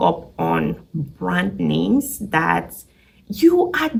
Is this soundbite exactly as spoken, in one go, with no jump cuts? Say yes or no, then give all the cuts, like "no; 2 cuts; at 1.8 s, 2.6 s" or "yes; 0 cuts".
yes; 0 cuts